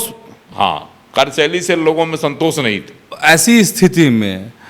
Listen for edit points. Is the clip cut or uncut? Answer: cut